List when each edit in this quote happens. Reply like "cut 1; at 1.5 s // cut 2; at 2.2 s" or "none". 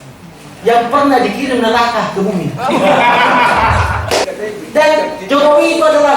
cut 1; at 4.3 s